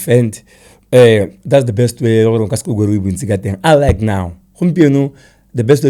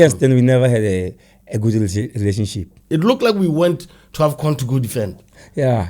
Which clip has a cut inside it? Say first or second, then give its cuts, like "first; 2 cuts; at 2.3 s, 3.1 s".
second; 1 cut; at 2.7 s